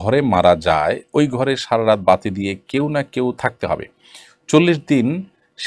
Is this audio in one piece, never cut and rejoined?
yes; 0 cuts

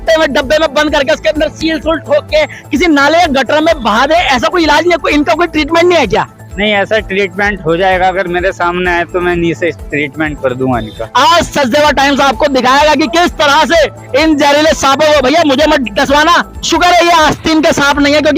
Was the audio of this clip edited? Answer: yes; 2 cuts; at 11.0 s, 16.6 s

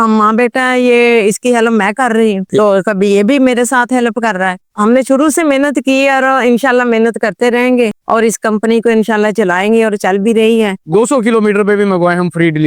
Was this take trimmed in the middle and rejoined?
yes; 1 cut; at 10.8 s

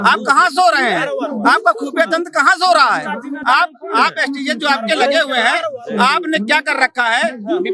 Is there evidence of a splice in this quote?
no; 0 cuts

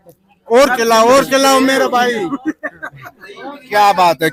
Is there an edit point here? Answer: no; 0 cuts

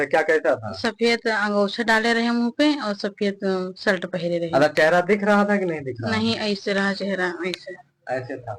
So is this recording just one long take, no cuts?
yes; 0 cuts

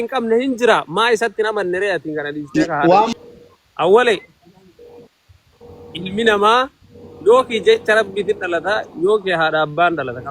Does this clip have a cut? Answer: yes; 1 cut; at 3.1 s

